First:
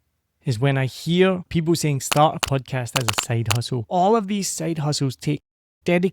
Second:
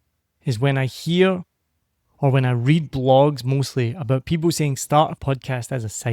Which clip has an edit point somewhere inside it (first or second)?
first